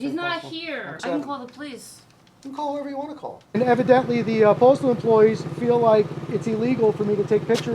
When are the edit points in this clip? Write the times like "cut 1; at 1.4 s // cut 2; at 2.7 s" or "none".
cut 1; at 0.9 s // cut 2; at 3.6 s

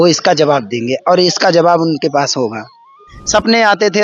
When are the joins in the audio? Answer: cut 1; at 3.1 s

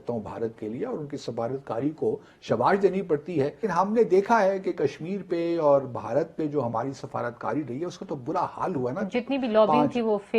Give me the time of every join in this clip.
cut 1; at 3.6 s

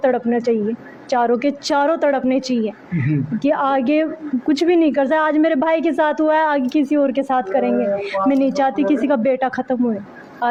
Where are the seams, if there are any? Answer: none

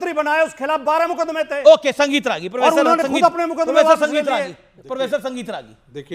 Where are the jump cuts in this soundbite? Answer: none

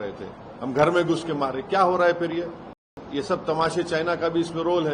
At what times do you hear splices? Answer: cut 1; at 3.0 s

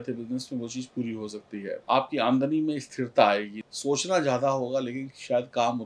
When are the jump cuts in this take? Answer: cut 1; at 1.8 s // cut 2; at 3.6 s

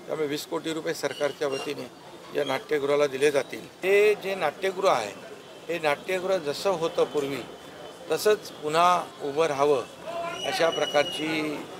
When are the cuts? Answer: cut 1; at 3.6 s

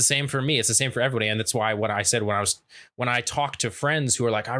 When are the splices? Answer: none

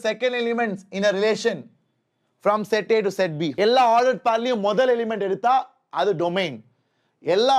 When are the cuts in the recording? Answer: cut 1; at 3.4 s

